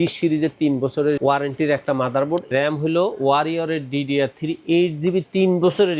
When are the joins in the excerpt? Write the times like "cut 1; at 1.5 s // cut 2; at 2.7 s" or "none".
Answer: cut 1; at 2.5 s